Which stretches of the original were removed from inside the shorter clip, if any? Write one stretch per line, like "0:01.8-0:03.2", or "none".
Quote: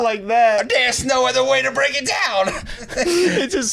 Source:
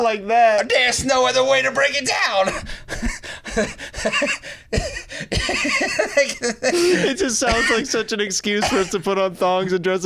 0:02.8-0:06.5